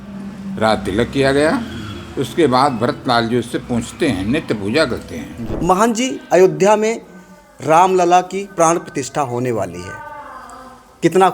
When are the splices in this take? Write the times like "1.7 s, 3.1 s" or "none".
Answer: 5.4 s